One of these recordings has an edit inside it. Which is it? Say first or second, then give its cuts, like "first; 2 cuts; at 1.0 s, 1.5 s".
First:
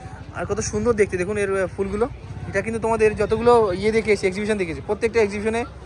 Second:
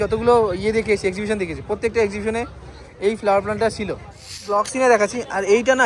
second; 1 cut; at 4.6 s